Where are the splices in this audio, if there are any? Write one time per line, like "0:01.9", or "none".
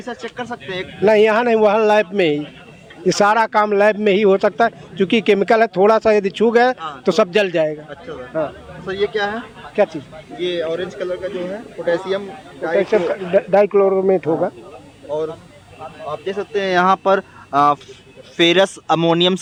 none

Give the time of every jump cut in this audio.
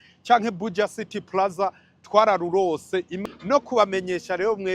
0:03.1

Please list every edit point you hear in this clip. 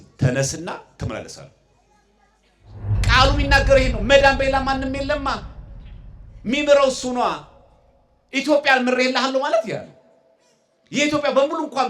0:03.0

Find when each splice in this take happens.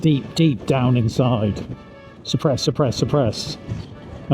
none

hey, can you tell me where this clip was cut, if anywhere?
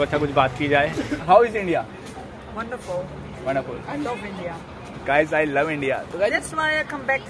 0:01.2

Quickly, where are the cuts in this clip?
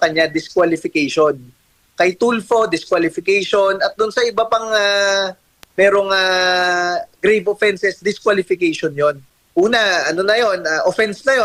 0:09.3

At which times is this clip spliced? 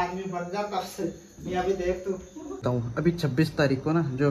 0:02.6

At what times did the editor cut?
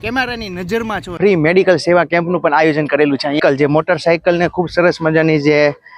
0:01.1
0:03.4

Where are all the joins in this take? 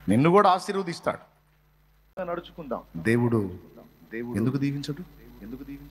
0:02.2

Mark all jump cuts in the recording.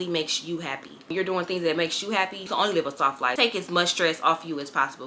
0:02.4
0:03.3

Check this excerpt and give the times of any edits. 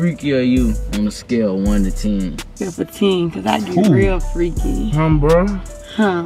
0:02.6

